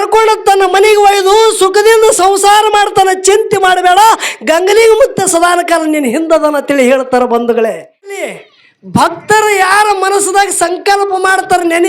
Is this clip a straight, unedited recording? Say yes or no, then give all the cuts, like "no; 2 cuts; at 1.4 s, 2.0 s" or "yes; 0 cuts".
no; 1 cut; at 8.2 s